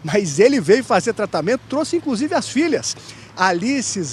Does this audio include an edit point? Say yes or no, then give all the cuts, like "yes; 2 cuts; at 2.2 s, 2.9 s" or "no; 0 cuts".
no; 0 cuts